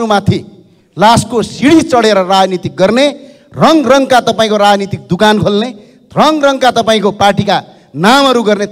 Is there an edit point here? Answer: no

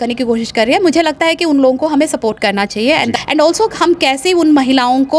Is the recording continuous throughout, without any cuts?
no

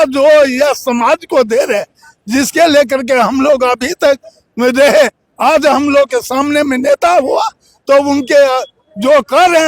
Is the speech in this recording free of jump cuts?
yes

